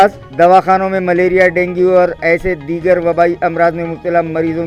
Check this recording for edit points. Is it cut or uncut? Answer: uncut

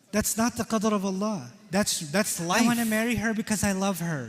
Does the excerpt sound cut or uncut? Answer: cut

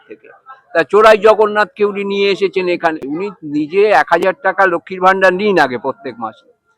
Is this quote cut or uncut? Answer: cut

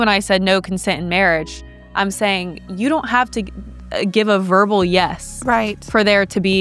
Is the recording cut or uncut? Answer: uncut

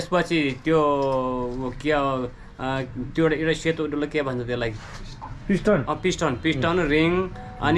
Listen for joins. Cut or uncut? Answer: uncut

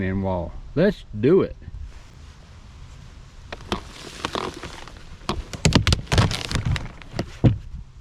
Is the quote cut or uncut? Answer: cut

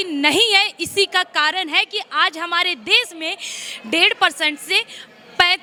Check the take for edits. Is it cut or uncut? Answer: uncut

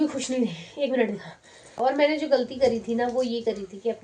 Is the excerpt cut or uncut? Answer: cut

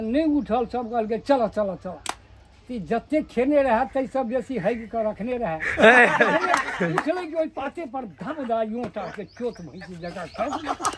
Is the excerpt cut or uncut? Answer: uncut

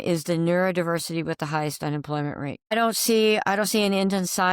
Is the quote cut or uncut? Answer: cut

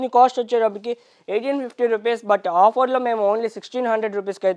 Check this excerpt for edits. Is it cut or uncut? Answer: uncut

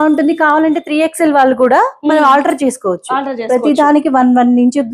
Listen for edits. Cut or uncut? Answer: uncut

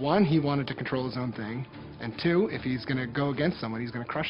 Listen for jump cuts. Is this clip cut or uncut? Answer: uncut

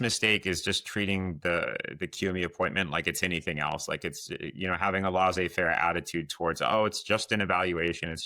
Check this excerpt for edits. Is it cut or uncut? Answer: uncut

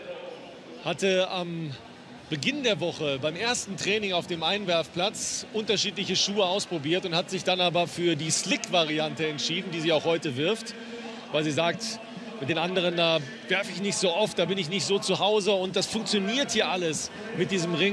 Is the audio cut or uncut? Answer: cut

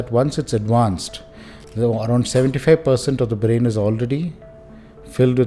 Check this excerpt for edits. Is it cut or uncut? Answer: uncut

